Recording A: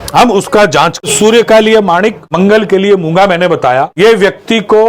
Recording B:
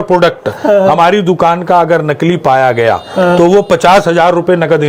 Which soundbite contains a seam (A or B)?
A